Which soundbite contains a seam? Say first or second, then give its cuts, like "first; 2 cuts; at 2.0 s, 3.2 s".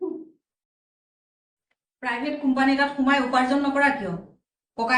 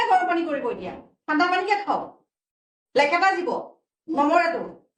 first; 1 cut; at 2.1 s